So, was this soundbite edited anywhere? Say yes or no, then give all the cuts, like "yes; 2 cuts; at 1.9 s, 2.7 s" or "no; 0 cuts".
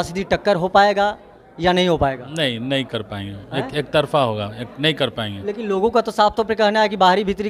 no; 0 cuts